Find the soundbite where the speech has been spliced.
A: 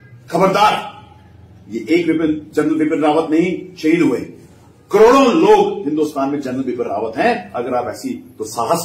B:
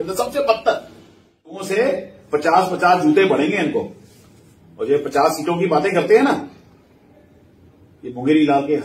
B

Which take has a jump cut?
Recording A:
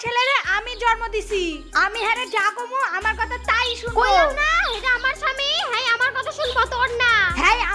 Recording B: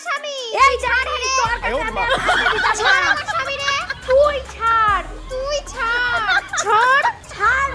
B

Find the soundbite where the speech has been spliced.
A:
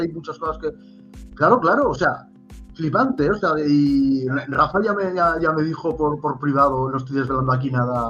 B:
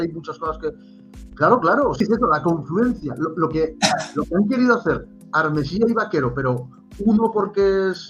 B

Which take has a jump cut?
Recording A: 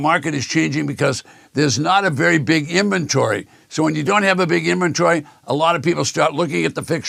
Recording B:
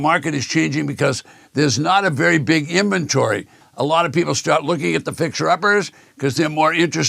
B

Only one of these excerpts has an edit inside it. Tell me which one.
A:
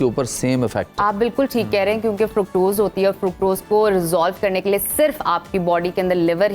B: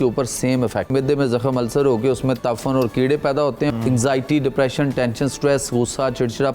B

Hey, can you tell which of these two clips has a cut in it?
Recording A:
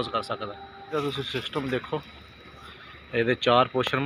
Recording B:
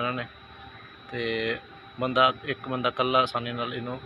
A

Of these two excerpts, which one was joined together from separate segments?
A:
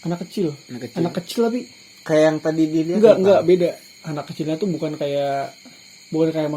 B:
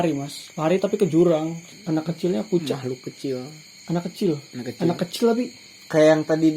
B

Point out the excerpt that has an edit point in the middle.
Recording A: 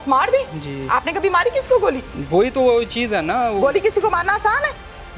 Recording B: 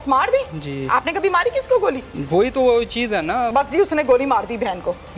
B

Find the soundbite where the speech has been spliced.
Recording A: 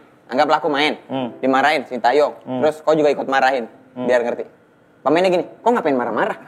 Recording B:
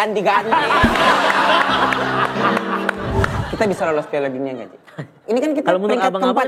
B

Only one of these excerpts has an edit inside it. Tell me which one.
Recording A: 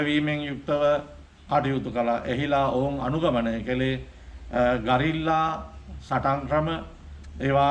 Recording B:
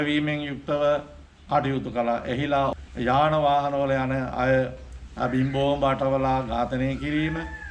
B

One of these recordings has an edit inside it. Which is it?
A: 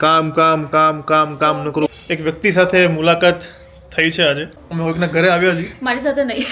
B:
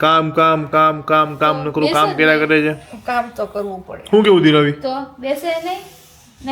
A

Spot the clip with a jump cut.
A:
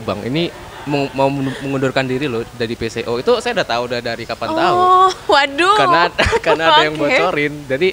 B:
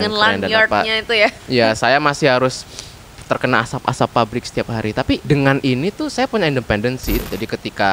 B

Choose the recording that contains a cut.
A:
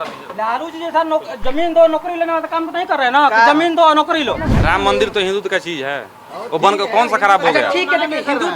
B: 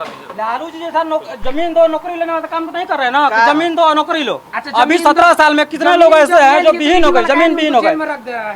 A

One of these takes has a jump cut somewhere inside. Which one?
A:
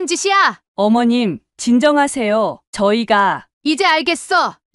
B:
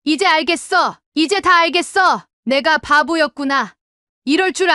B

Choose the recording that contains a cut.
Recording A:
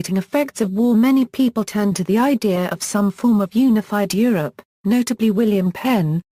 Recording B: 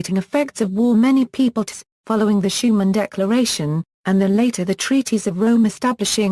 A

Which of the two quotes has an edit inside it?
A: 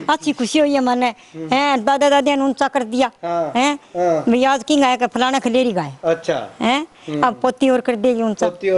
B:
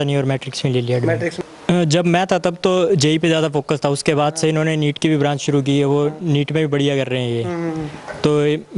B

